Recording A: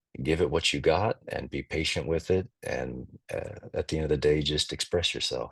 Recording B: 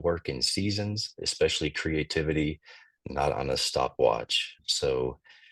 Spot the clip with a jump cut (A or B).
B